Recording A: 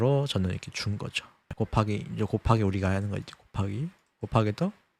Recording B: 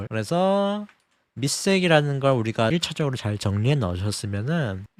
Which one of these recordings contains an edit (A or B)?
A